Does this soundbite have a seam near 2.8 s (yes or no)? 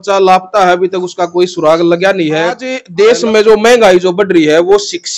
yes